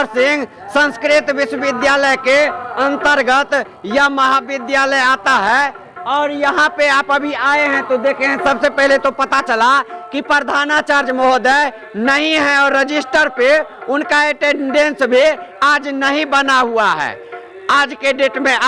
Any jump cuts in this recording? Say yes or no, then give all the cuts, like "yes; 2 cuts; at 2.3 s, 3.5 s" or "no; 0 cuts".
no; 0 cuts